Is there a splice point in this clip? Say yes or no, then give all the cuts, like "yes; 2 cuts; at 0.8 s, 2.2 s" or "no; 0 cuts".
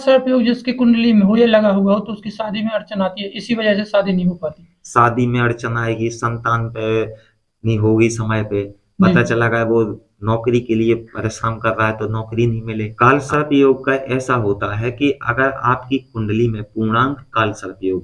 yes; 1 cut; at 12.8 s